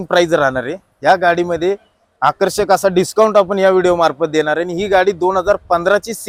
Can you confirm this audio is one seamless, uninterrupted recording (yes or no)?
yes